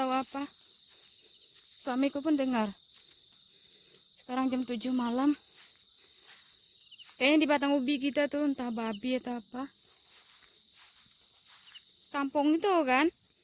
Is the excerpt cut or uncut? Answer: cut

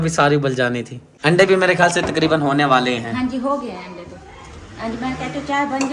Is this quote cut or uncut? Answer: uncut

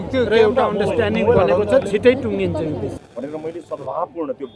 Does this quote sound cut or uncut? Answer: cut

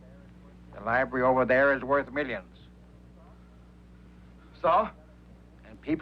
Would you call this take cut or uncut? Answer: uncut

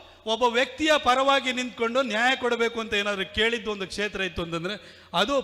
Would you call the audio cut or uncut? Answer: uncut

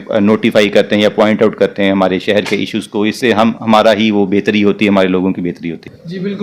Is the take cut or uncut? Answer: uncut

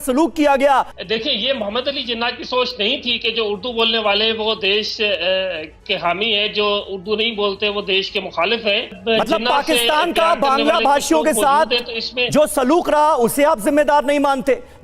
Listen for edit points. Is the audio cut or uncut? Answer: cut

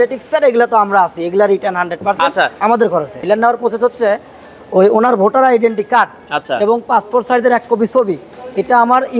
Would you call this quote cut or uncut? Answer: cut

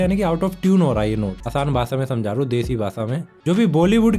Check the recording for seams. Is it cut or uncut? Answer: cut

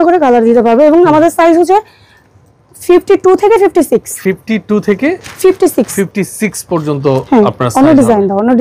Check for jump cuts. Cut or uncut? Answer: uncut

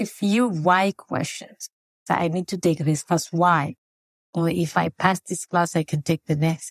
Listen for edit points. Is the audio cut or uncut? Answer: cut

